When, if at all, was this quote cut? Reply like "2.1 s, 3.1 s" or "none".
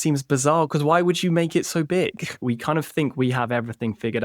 2.4 s

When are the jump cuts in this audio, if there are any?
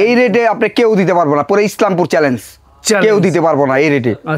none

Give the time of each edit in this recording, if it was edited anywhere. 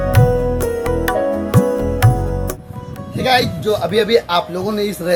none

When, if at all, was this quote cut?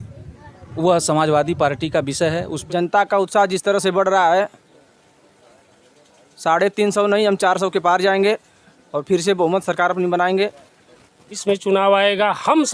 2.5 s, 11.3 s

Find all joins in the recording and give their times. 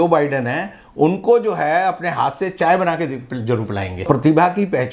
4.0 s

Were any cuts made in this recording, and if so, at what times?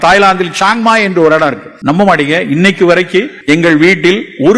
1.7 s, 3.3 s

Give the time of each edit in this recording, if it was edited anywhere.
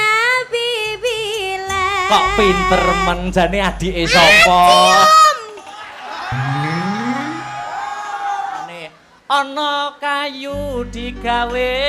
8.7 s

